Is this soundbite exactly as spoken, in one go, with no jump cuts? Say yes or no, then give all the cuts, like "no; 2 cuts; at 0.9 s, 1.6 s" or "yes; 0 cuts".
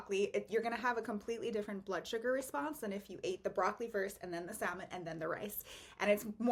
yes; 0 cuts